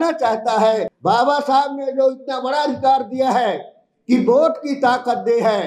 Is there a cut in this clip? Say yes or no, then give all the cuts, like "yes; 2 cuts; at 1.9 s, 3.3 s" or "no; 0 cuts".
yes; 1 cut; at 0.9 s